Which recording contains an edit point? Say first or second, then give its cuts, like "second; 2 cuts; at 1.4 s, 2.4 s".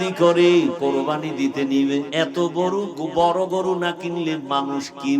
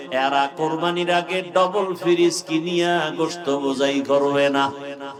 first; 2 cuts; at 0.8 s, 2.1 s